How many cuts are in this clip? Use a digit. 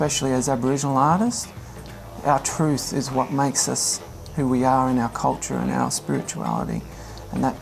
0